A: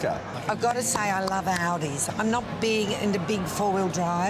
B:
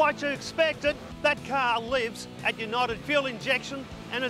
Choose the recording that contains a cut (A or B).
B